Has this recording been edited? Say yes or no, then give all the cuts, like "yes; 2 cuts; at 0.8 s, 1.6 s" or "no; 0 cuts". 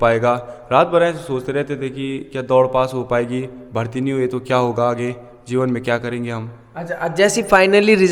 no; 0 cuts